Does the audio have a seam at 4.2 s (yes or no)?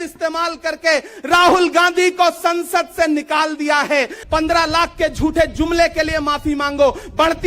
yes